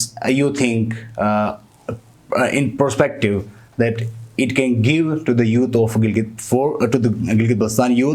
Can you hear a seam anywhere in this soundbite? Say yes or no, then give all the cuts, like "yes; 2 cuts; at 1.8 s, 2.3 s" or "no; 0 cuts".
no; 0 cuts